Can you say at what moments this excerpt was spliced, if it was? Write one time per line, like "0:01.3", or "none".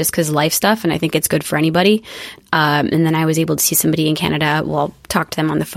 0:02.4